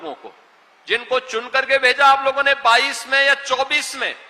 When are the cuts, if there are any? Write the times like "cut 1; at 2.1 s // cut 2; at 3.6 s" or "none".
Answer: none